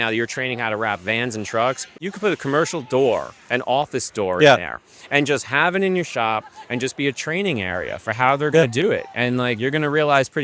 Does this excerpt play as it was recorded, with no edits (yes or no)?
no